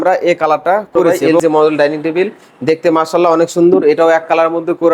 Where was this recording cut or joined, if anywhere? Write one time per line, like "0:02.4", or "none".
0:01.3